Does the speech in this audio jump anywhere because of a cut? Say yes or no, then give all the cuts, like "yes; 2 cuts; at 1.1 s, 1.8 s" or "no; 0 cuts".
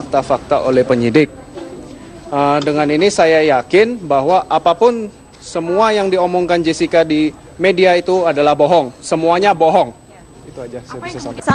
yes; 1 cut; at 1.8 s